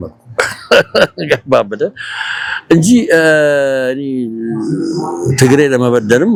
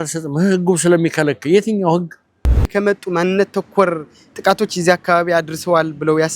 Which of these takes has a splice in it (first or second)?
second